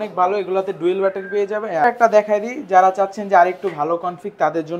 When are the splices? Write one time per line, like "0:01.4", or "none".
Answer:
0:01.8